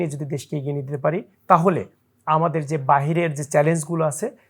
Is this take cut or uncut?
cut